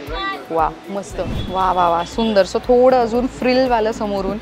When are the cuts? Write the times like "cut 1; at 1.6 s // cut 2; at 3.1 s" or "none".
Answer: cut 1; at 1.4 s